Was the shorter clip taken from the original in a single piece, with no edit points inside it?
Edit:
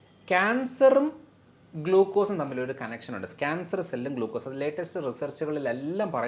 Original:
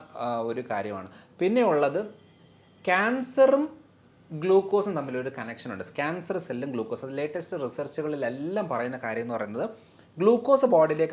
yes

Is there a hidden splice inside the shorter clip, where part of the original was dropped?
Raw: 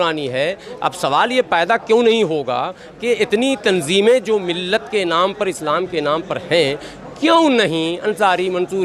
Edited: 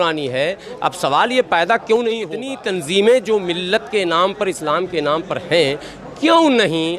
yes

